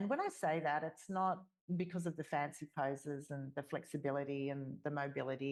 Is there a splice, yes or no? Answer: no